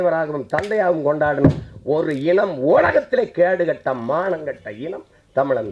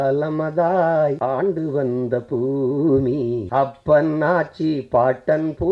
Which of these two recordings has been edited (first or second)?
second